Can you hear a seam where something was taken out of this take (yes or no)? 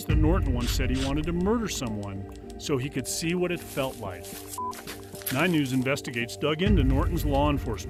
no